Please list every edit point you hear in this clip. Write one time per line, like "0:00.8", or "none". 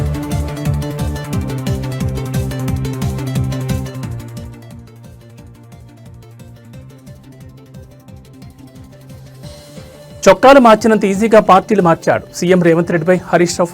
0:10.2